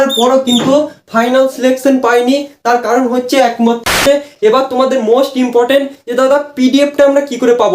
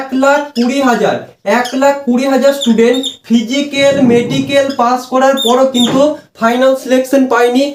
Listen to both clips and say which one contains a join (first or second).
first